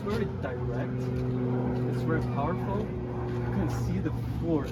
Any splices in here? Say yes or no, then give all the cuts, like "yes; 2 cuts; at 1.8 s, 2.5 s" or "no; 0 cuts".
no; 0 cuts